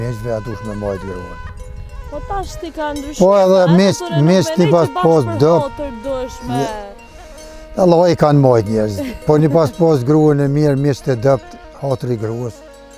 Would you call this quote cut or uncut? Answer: uncut